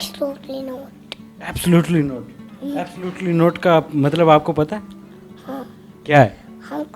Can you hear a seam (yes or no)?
no